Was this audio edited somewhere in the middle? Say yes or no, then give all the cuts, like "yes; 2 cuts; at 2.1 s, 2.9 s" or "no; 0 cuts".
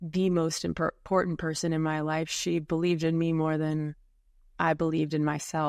no; 0 cuts